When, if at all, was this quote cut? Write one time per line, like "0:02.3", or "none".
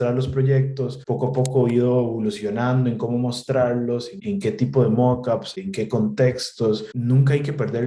0:01.0
0:04.1
0:05.6
0:06.9